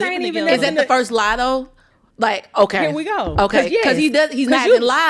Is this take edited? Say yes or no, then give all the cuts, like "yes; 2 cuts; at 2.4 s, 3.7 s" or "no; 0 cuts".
no; 0 cuts